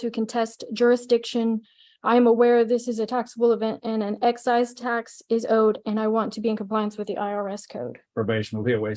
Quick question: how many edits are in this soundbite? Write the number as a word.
one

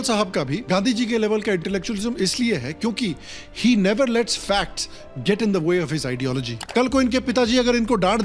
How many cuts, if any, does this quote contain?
one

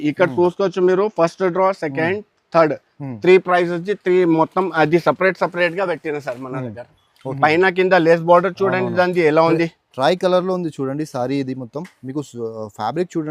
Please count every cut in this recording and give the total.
one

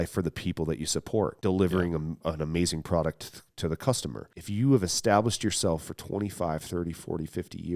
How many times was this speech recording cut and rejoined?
three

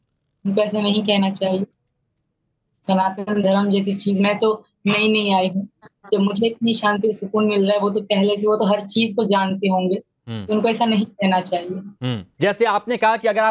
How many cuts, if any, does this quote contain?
one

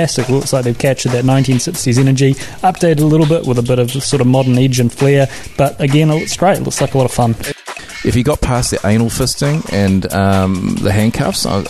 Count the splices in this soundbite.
one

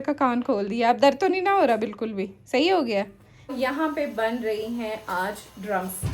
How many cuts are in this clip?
one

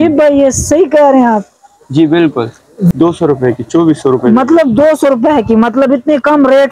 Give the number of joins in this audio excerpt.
one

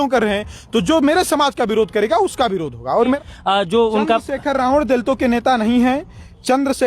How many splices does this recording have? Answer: one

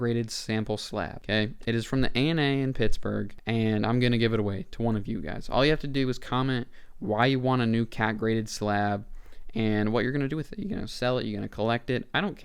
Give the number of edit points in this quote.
two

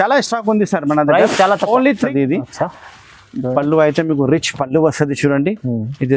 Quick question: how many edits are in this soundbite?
one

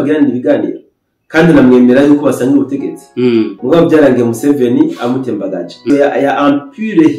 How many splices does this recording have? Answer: one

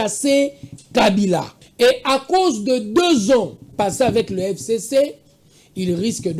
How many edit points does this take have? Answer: one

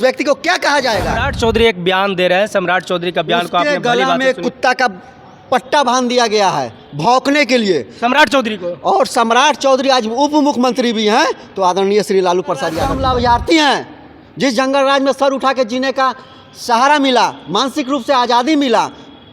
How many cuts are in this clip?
two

